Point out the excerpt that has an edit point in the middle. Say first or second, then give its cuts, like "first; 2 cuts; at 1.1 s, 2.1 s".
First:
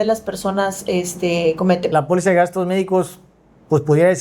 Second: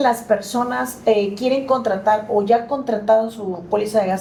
first; 1 cut; at 1.9 s